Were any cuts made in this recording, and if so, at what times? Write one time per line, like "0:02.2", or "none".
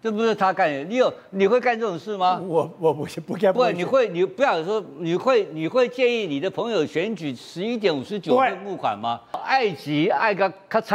0:09.4

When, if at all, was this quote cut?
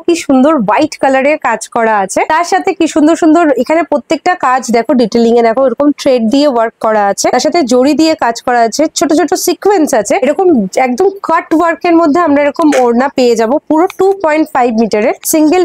none

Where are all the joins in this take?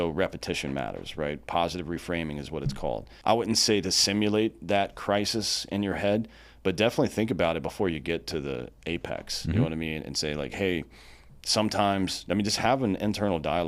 0:03.1

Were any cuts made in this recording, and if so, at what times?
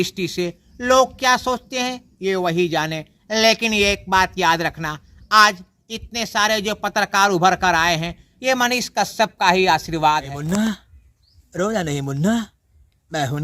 0:10.3

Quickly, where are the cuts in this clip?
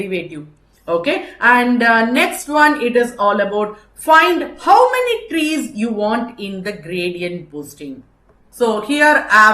0:08.4

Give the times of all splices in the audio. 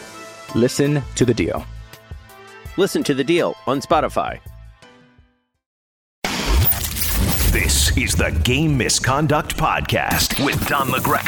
0:06.2

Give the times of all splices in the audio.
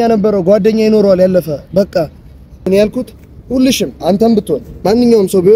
0:02.7

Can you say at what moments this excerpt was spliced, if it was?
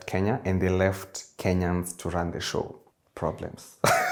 none

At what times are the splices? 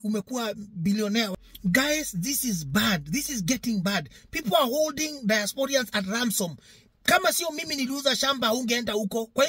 0:01.3

